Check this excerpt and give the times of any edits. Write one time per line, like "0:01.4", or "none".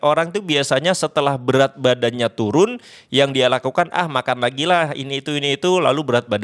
none